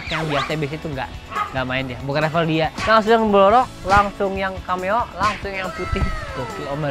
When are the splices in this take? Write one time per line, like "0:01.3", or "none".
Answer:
none